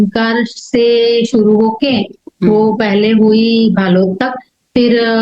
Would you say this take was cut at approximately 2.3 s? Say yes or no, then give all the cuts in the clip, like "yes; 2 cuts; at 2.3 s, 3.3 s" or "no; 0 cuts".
no; 0 cuts